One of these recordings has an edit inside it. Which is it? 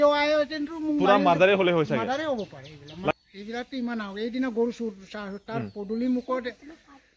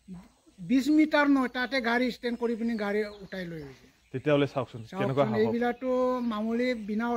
first; 1 cut; at 3.1 s

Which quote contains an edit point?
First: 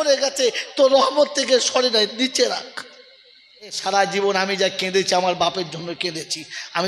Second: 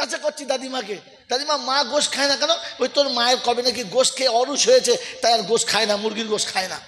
first; 1 cut; at 3.8 s

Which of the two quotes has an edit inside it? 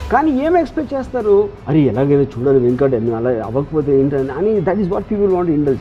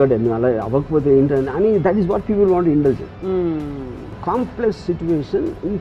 second; 1 cut; at 4.2 s

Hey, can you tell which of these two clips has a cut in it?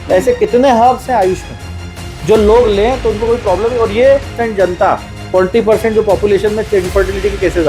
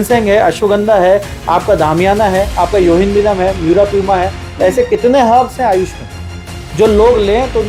first; 1 cut; at 4.4 s

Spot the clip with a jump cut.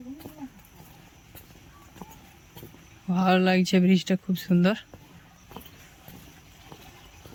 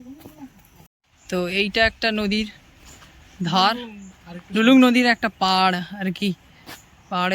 second; 1 cut; at 1.1 s

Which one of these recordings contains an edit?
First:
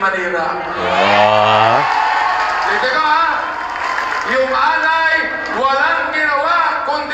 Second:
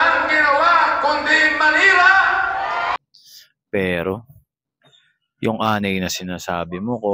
second; 1 cut; at 3.0 s

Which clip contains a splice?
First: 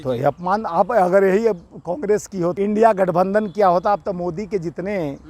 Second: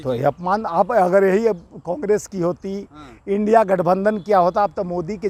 first; 1 cut; at 2.6 s

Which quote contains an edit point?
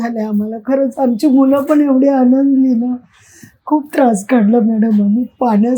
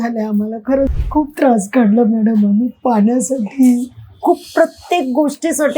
second; 1 cut; at 0.9 s

